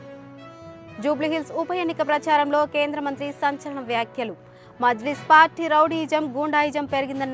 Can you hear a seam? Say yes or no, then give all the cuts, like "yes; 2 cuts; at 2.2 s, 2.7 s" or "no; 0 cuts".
yes; 1 cut; at 0.9 s